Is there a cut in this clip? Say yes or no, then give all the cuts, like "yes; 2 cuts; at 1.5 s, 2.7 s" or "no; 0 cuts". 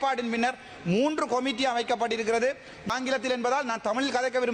yes; 1 cut; at 2.9 s